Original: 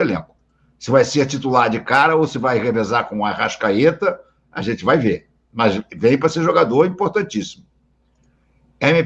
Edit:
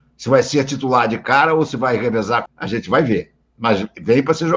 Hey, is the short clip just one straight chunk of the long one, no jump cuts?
no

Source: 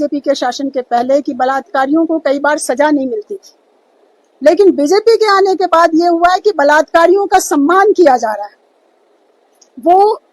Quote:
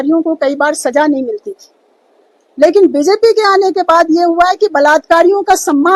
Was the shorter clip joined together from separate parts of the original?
no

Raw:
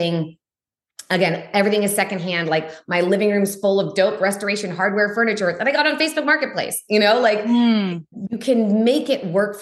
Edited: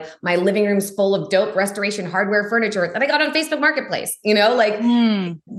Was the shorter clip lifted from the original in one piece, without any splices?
yes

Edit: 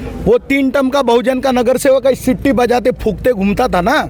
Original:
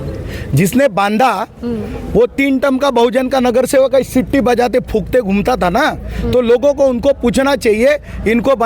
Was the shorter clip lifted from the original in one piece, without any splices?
yes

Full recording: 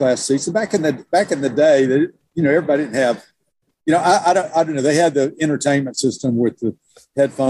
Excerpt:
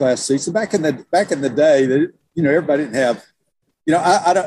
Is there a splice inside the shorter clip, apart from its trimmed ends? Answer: no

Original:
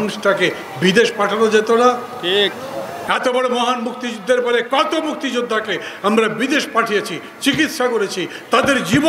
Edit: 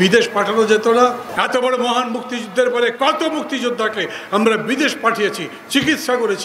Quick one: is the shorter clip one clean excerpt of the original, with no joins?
no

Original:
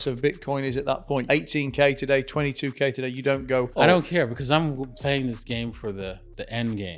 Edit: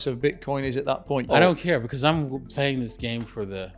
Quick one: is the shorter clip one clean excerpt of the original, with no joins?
no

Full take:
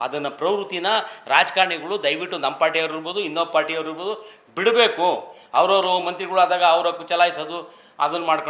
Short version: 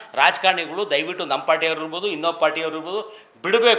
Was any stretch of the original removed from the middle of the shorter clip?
no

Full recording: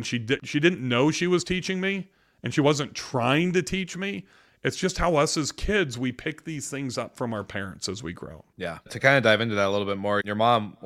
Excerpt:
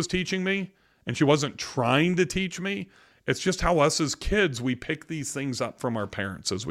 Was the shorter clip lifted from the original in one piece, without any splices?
yes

